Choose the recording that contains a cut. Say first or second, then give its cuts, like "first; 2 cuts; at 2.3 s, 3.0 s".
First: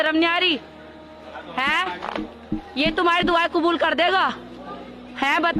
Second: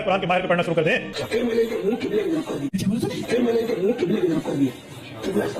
second; 1 cut; at 1.1 s